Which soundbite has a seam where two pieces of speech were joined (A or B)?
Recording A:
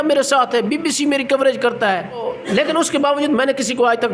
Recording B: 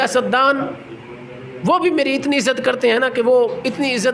A